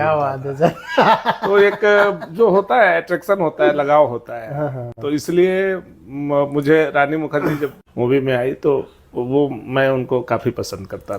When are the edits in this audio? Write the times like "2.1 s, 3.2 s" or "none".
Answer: 7.8 s